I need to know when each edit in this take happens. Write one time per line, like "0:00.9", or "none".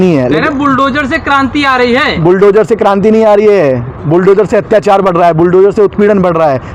none